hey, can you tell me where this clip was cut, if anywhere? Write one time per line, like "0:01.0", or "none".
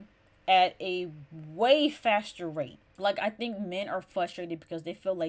0:02.8